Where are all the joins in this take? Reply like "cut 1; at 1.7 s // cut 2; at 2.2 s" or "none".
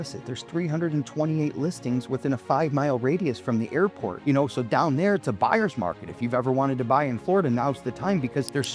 none